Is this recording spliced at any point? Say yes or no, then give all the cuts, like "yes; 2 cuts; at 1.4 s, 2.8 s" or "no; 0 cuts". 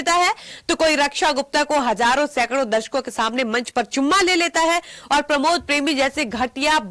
no; 0 cuts